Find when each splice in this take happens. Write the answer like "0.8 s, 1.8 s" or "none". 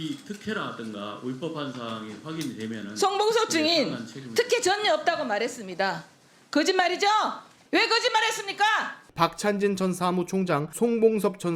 7.5 s, 9.0 s